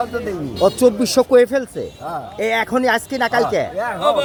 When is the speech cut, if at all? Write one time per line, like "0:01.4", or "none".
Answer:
none